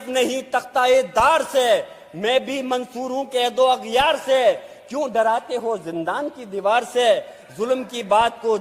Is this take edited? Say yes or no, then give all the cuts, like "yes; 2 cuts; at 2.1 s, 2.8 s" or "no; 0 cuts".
no; 0 cuts